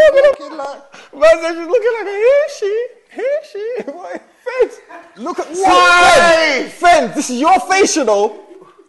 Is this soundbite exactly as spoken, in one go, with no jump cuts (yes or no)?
no